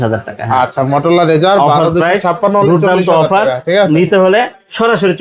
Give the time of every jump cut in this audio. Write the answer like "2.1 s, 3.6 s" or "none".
none